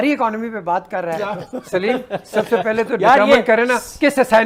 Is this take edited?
no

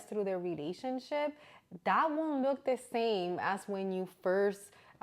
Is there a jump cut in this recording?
no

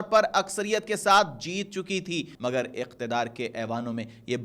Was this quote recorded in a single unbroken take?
no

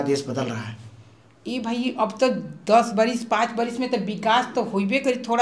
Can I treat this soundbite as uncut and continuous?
yes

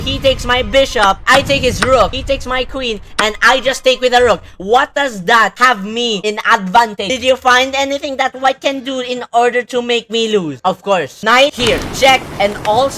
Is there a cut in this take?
yes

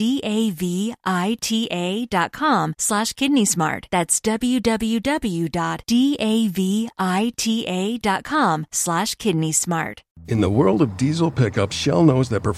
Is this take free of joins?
no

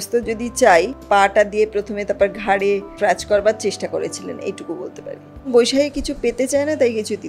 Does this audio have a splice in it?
yes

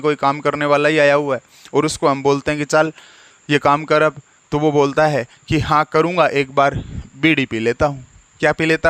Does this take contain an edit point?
no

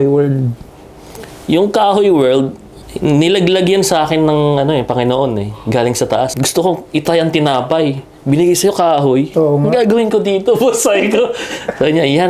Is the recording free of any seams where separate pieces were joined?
no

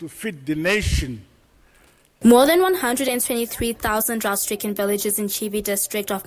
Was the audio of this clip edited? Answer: yes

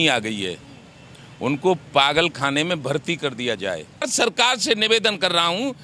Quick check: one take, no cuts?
no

